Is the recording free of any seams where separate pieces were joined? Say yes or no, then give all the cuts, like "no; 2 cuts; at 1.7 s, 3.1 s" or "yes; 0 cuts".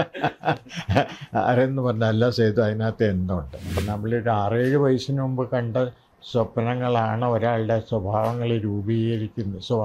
no; 1 cut; at 3.8 s